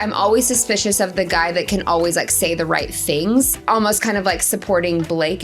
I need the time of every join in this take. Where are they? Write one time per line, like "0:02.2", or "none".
0:03.6